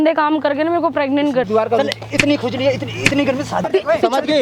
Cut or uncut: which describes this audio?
cut